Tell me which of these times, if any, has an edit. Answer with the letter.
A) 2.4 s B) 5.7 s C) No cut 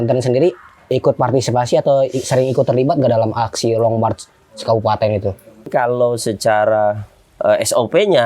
B